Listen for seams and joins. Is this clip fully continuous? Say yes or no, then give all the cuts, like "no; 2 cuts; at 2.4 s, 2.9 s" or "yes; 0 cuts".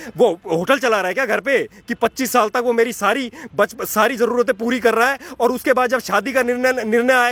yes; 0 cuts